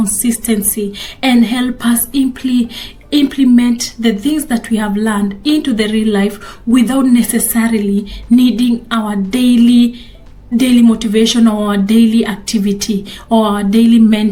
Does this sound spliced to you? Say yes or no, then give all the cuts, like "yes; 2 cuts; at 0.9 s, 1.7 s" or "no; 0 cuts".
no; 0 cuts